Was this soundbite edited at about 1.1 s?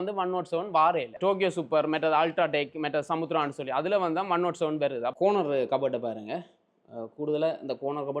yes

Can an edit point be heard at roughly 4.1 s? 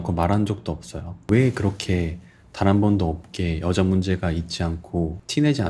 no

